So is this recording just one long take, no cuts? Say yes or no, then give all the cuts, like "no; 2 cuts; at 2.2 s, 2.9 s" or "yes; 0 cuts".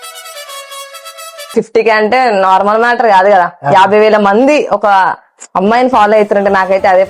no; 1 cut; at 1.5 s